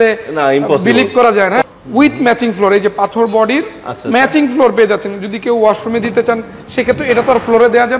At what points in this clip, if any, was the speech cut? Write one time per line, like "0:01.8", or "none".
0:01.6